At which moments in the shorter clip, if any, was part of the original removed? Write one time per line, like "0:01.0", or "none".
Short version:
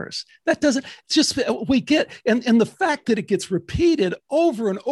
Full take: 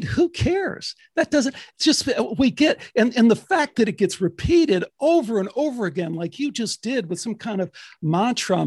none